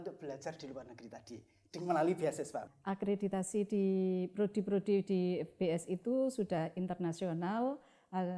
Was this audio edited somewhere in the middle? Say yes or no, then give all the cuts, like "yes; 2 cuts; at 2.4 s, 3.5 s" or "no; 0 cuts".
yes; 1 cut; at 2.6 s